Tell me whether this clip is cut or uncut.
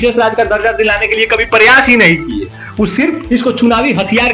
uncut